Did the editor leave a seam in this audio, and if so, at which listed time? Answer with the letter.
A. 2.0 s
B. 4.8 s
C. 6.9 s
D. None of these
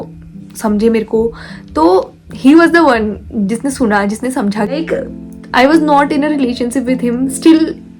B